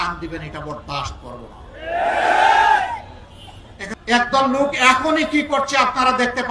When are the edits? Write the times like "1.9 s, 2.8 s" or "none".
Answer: 3.9 s